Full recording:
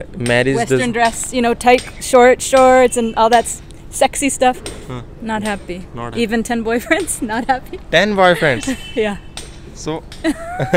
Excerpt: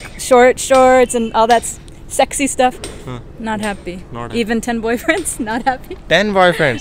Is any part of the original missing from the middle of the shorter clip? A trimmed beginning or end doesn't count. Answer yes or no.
no